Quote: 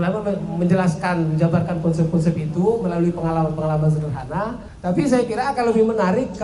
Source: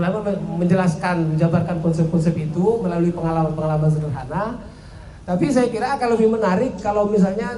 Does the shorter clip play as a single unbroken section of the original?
no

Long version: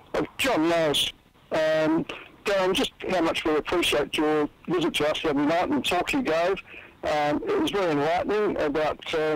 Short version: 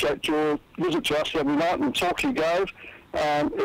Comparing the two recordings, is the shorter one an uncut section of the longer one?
yes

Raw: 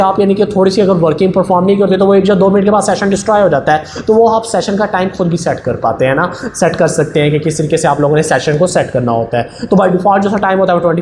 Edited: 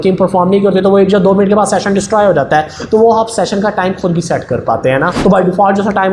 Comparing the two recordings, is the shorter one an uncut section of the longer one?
no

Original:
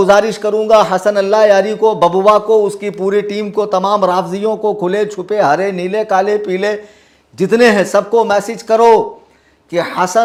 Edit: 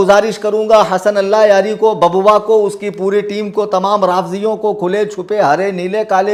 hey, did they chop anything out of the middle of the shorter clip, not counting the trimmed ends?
no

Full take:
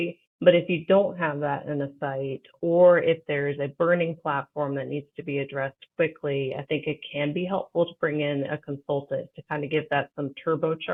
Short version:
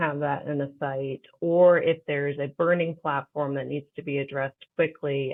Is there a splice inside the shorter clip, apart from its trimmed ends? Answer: no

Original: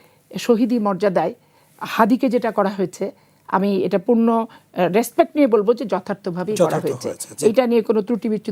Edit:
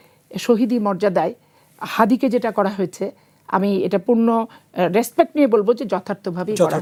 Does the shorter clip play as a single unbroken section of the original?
yes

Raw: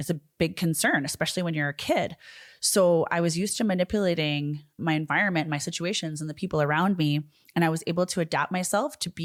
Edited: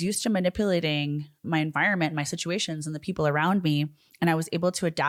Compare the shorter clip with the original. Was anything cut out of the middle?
no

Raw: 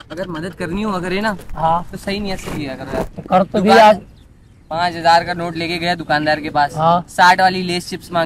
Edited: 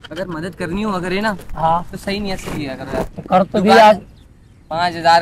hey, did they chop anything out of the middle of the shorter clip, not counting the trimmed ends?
no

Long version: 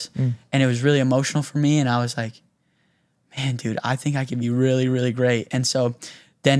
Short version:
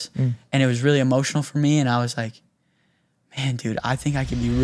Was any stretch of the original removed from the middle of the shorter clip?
no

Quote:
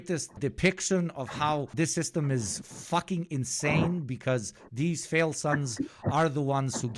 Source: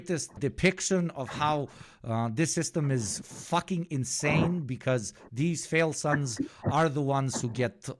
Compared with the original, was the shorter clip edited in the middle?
yes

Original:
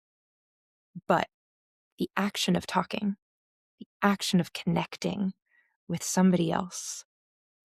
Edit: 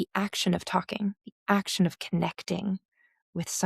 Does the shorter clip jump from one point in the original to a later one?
yes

